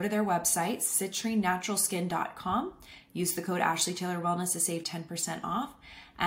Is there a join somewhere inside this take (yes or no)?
no